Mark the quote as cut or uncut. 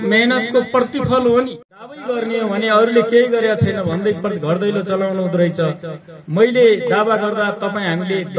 cut